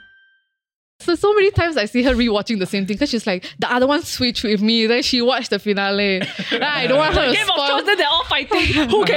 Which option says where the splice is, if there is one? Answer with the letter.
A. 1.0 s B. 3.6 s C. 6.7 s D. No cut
A